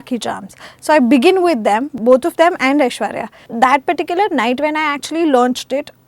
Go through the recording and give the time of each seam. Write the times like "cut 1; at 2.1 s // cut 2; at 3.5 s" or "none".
cut 1; at 1.9 s // cut 2; at 3.5 s